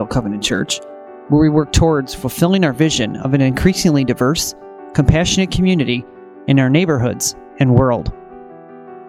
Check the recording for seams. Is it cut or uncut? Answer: cut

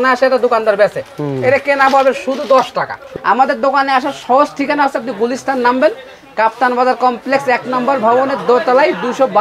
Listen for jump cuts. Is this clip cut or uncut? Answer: cut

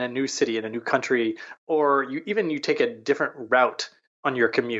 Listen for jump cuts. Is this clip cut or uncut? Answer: uncut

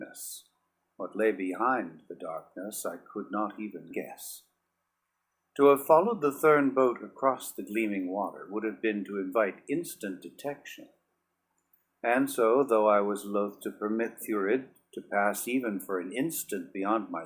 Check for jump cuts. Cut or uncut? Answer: cut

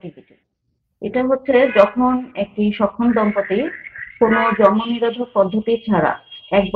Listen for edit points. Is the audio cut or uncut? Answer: uncut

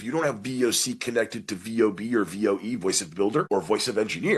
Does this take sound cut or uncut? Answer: cut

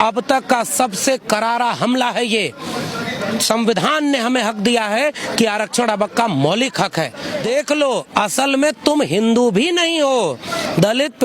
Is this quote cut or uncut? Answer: cut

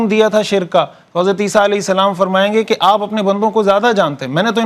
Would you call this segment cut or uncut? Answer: uncut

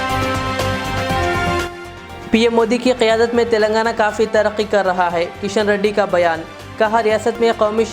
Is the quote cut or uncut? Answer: cut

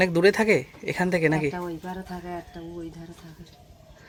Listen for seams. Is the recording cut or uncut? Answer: uncut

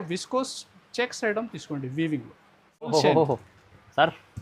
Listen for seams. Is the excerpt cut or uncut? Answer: cut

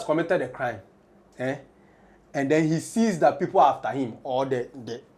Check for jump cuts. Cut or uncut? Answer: uncut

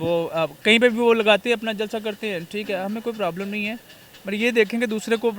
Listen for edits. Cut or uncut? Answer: uncut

